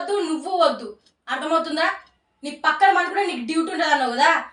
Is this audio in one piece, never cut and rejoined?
yes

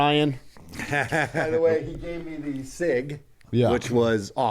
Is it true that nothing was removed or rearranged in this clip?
no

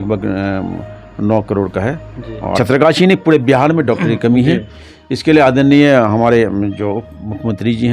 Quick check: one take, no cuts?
no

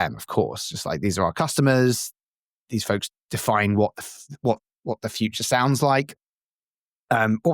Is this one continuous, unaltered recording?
yes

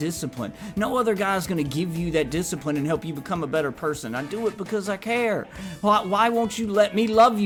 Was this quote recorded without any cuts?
yes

